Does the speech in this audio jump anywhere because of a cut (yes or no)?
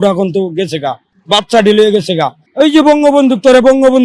yes